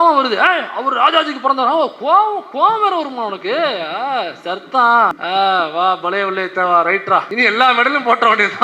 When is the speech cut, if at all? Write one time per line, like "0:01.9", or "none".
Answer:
0:05.2
0:07.3